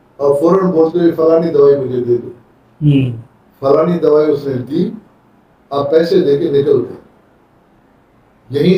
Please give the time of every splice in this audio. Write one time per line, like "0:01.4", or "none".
none